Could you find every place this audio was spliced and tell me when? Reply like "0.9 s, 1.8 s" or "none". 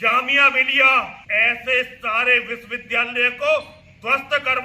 1.2 s